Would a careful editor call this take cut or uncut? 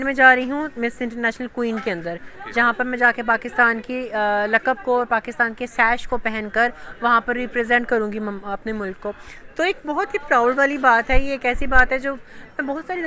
uncut